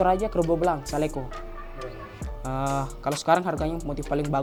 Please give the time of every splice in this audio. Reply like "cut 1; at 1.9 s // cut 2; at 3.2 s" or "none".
none